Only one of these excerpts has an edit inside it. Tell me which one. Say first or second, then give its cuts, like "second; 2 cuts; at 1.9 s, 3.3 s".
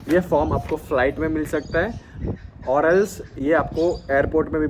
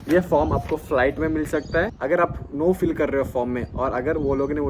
second; 1 cut; at 2.0 s